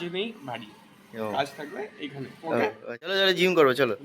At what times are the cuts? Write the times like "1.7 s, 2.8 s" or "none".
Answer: 3.1 s